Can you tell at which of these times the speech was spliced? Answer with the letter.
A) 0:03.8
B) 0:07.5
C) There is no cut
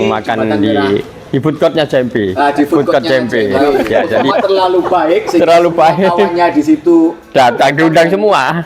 A